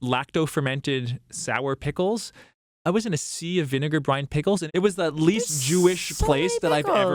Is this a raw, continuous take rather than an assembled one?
yes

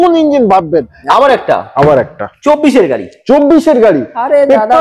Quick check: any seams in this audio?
yes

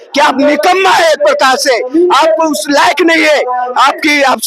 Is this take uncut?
yes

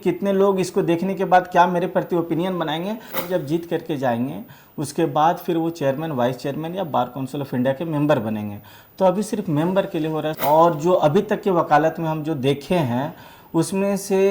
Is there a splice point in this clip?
yes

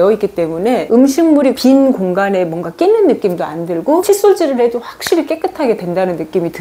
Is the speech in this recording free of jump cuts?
yes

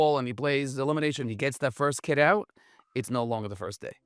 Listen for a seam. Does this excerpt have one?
no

